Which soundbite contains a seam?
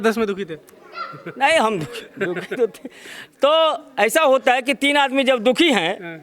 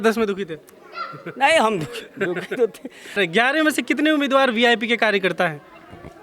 second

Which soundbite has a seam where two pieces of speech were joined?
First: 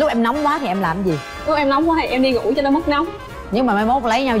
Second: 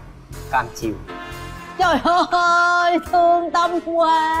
first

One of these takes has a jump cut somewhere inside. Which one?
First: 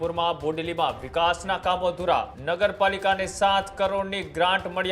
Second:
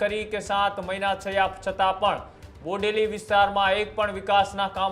first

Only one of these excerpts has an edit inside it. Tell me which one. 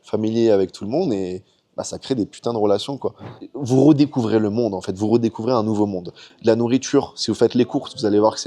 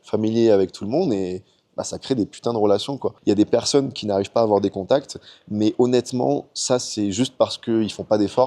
first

